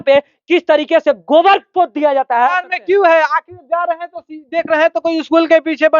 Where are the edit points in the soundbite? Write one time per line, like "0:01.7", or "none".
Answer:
0:02.7